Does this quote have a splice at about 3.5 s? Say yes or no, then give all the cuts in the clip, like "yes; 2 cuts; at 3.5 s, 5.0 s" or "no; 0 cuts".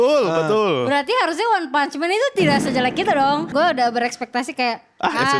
yes; 1 cut; at 3.5 s